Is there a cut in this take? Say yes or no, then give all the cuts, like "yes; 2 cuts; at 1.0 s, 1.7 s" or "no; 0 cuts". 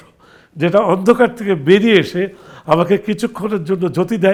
no; 0 cuts